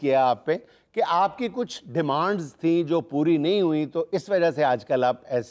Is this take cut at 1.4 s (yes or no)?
no